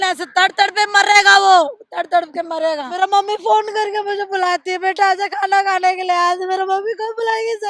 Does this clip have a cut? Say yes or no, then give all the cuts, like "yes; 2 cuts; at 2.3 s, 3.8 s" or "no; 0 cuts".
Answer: yes; 1 cut; at 2.9 s